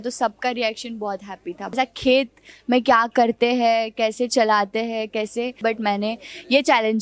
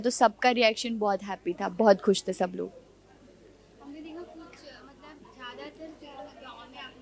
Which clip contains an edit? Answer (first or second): first